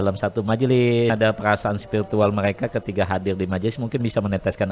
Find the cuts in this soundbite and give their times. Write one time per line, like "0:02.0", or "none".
0:01.1

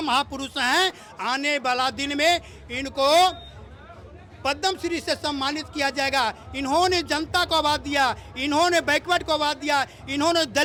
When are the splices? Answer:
none

